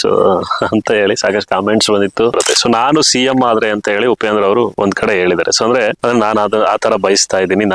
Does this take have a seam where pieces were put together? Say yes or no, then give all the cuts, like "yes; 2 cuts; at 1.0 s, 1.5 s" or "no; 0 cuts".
yes; 2 cuts; at 2.3 s, 6.0 s